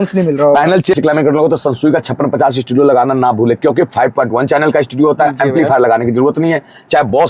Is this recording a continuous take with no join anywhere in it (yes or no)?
no